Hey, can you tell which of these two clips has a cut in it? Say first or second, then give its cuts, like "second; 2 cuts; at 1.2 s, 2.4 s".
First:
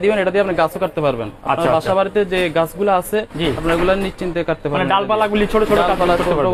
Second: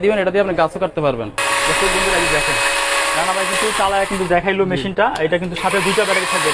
second; 1 cut; at 1.4 s